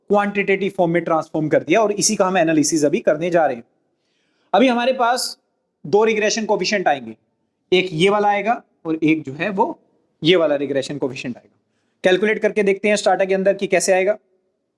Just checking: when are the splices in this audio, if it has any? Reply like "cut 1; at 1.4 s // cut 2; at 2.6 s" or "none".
none